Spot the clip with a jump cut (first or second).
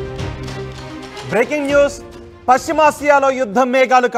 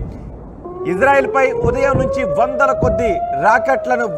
first